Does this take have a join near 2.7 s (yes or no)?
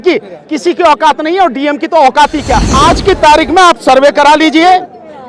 yes